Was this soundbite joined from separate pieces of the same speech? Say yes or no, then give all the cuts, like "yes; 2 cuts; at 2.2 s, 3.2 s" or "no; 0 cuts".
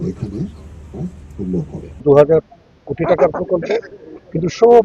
yes; 1 cut; at 2.0 s